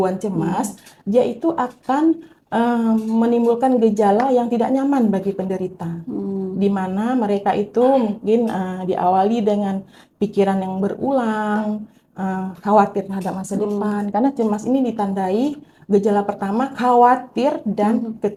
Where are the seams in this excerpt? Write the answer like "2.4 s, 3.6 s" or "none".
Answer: none